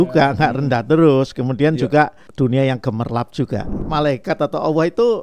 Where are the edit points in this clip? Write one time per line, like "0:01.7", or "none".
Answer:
0:02.2
0:03.8